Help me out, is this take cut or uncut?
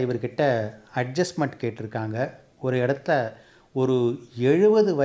uncut